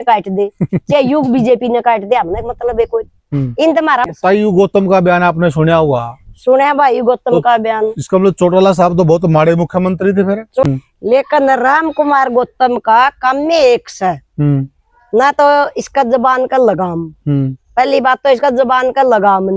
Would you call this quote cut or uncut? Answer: cut